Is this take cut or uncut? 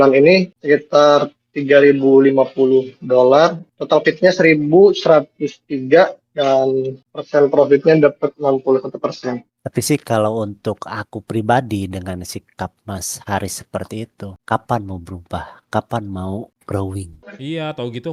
cut